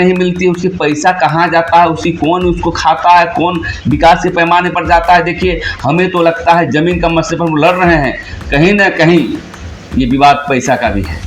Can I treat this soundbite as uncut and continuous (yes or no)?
yes